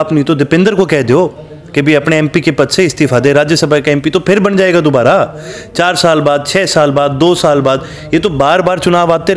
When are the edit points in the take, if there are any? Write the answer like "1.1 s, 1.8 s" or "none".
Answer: none